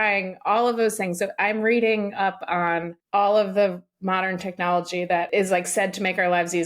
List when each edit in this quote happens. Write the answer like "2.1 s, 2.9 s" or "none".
3.0 s, 5.3 s